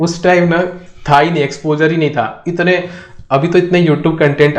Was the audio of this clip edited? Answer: no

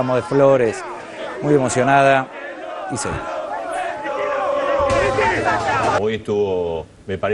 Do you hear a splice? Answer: yes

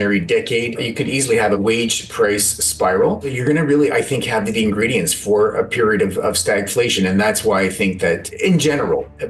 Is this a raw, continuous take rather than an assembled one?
no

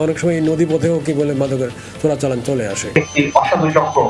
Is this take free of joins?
no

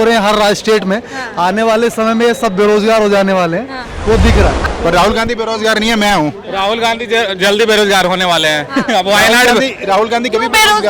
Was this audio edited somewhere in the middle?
yes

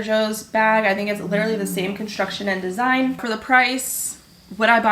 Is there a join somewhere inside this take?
yes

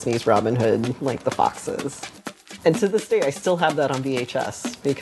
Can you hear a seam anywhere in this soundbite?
yes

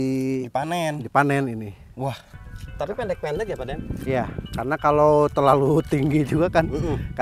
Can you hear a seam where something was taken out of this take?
yes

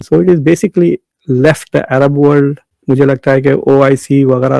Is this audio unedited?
no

